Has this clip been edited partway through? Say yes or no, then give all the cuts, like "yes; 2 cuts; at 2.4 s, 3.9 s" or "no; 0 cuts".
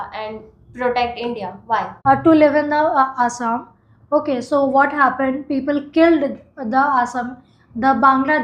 yes; 1 cut; at 1.9 s